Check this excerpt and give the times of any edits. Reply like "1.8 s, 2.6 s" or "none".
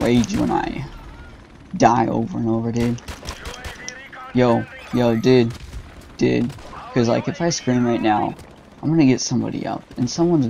none